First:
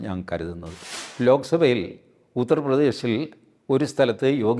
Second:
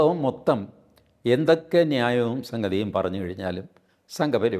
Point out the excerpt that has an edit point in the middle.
first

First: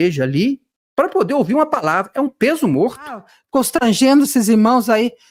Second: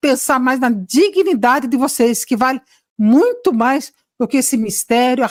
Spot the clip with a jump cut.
first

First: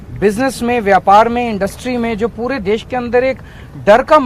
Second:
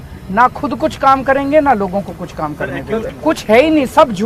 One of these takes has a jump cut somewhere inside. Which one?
second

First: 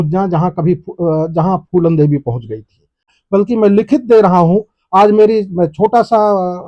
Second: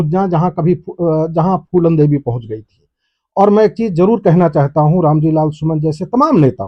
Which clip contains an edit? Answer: first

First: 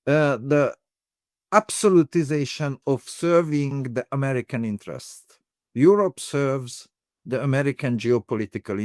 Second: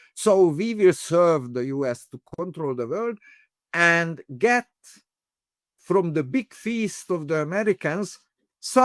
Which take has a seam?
first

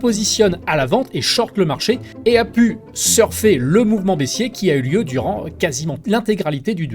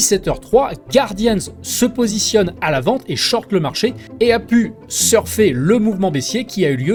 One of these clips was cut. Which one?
first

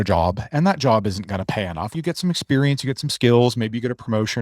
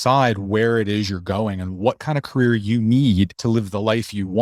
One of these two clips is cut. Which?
first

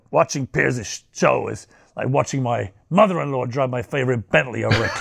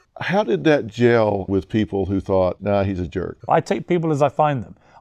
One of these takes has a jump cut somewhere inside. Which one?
second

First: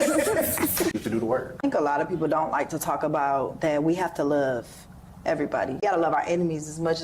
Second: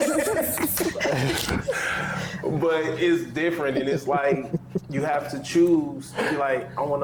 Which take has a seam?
first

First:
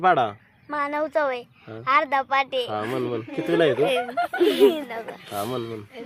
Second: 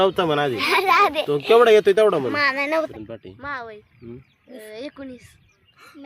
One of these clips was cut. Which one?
second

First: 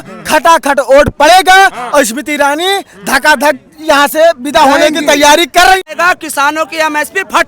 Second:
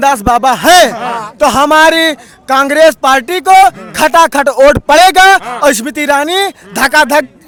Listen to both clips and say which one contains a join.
first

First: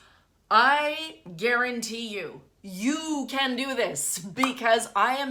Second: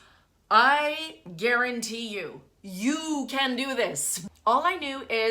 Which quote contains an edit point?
second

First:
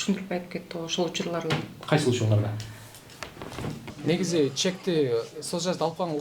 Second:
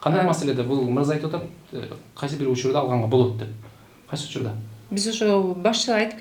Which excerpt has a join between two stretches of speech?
first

